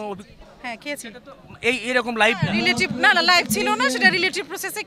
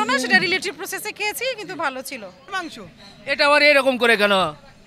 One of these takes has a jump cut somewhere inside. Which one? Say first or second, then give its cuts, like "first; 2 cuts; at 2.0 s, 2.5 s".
second; 1 cut; at 2.4 s